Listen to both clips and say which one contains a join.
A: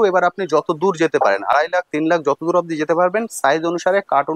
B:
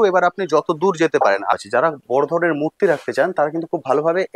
B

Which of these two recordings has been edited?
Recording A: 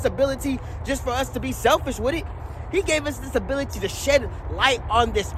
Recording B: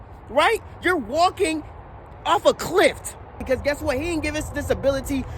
B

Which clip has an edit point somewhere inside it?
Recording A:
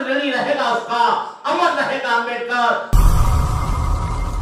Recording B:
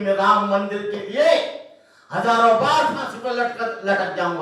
A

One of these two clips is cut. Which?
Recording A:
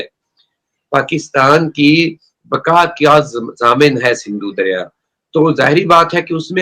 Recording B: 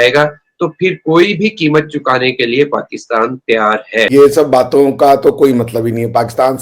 B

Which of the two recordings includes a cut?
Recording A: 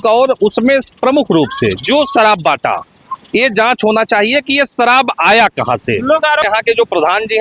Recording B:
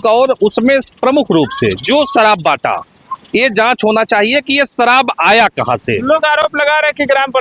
A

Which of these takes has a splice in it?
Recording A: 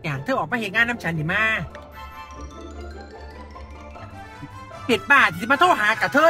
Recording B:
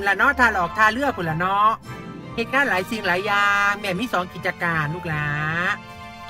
A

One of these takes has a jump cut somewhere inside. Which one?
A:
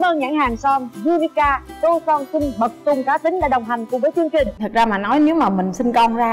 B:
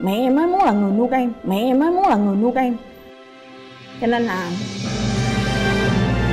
A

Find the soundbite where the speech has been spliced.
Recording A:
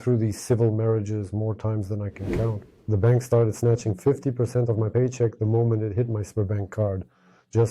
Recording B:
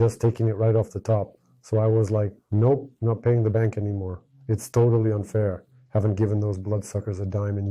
A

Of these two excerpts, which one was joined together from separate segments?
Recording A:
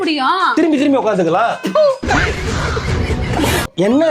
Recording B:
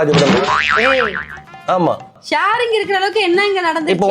B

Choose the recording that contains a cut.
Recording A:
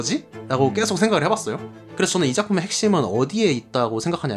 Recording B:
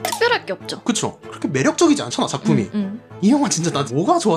B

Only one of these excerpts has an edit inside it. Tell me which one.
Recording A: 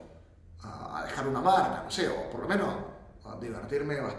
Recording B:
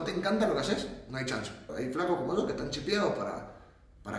B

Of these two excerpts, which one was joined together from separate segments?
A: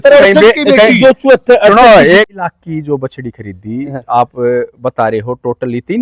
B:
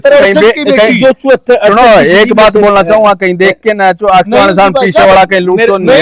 A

